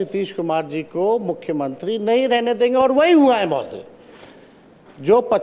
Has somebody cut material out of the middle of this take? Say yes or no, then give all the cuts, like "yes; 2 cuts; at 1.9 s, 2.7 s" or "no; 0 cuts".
no; 0 cuts